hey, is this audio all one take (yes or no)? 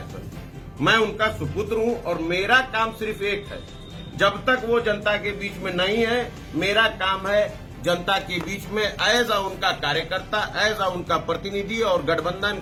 yes